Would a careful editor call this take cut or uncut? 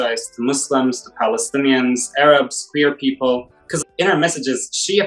cut